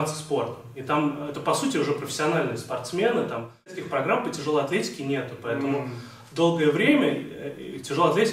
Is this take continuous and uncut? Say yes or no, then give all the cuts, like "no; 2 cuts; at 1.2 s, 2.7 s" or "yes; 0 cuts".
no; 1 cut; at 3.8 s